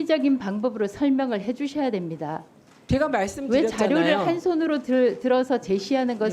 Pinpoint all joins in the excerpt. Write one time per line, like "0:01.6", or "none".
none